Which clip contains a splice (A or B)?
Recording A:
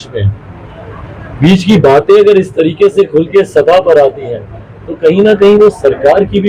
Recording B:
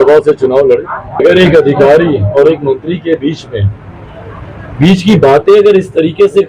B